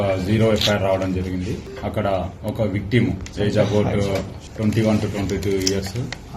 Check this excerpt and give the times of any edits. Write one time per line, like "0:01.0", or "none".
0:01.7
0:04.4

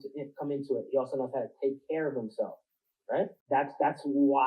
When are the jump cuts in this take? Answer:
0:03.4

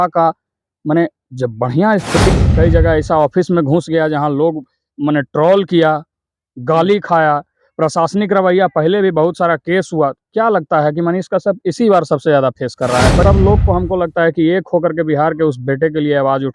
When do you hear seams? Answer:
0:02.3
0:13.2

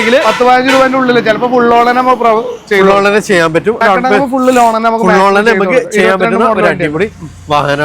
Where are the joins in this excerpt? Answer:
0:03.8

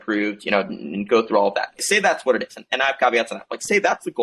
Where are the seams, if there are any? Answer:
0:01.8

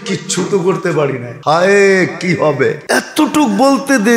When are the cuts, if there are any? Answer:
0:01.3
0:02.8

